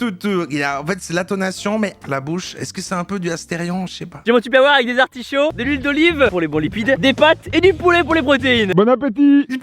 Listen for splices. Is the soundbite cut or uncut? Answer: cut